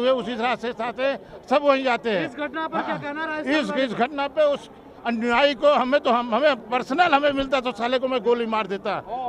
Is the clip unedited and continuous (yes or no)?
yes